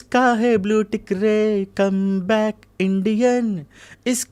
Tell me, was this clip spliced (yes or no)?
no